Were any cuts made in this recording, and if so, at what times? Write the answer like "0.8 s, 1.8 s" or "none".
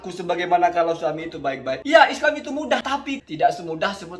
1.8 s, 2.9 s